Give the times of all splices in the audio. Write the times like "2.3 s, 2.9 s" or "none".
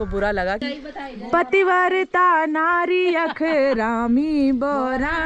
1.1 s